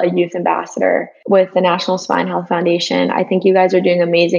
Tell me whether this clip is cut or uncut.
uncut